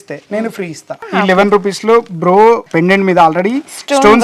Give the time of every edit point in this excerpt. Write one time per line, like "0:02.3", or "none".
0:01.0
0:02.6

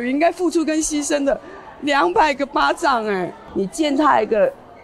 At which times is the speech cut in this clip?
0:03.4

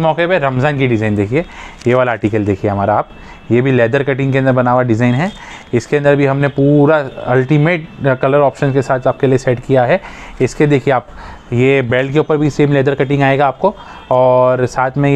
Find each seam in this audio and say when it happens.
none

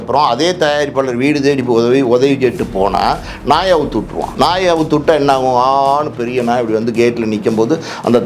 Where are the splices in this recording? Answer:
0:04.2

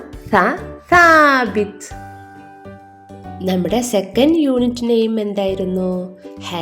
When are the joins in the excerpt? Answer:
0:01.7
0:03.4

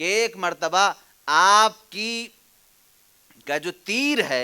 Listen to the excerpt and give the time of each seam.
none

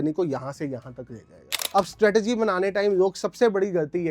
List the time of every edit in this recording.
0:01.7

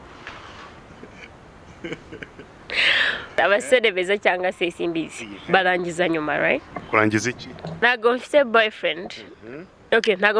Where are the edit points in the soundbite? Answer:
0:03.3
0:07.8

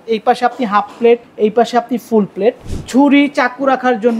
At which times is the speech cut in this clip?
0:01.3
0:02.7

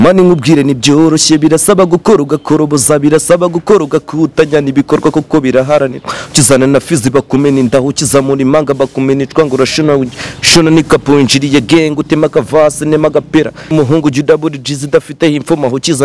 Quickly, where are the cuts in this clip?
0:13.7

